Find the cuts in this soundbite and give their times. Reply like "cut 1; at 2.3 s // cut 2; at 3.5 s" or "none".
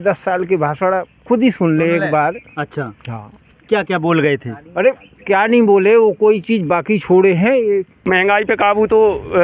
cut 1; at 7.9 s